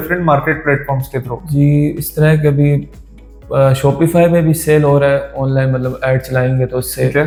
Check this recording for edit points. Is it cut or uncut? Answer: uncut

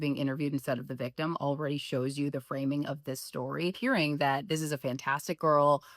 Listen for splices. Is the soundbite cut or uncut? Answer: cut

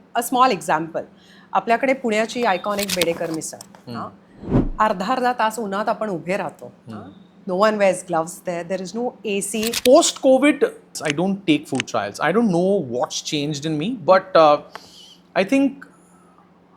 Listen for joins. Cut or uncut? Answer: cut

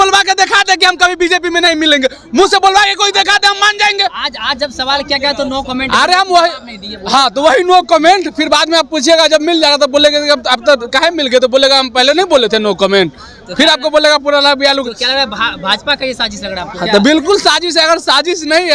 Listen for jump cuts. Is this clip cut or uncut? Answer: uncut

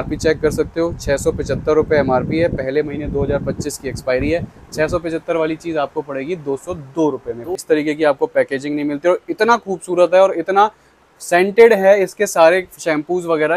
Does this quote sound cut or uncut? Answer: cut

